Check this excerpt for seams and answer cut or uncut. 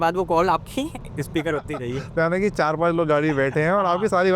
uncut